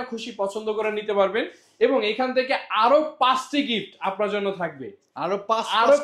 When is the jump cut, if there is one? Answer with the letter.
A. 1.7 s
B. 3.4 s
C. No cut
C